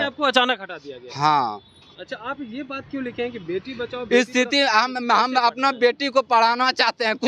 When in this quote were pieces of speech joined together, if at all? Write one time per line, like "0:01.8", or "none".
0:02.0